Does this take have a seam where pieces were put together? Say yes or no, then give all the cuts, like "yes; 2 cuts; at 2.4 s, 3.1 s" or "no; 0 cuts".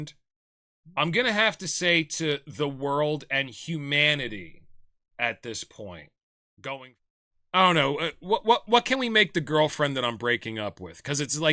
yes; 1 cut; at 6.9 s